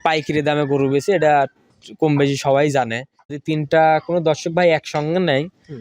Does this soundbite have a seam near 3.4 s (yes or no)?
yes